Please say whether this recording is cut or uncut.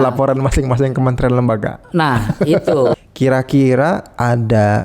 cut